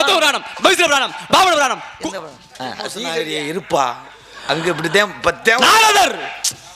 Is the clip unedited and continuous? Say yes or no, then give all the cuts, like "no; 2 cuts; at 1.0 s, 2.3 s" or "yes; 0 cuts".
no; 1 cut; at 3.0 s